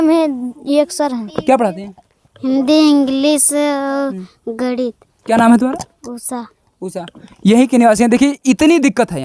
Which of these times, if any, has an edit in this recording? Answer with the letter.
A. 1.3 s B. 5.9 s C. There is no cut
A